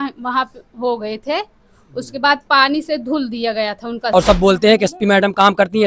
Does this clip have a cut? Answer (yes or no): yes